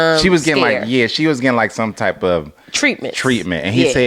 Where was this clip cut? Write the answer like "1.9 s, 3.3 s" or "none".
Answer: none